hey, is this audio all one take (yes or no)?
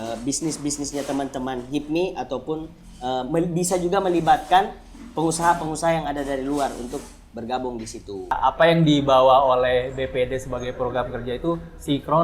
no